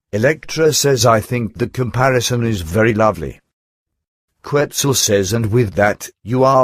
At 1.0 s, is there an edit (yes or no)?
yes